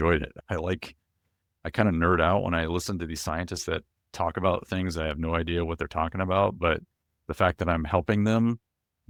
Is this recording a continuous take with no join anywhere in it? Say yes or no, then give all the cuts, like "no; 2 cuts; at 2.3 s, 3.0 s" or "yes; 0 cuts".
yes; 0 cuts